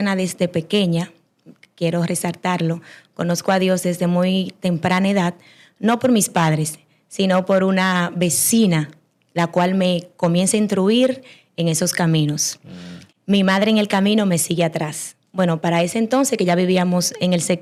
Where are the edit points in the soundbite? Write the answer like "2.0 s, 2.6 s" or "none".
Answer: none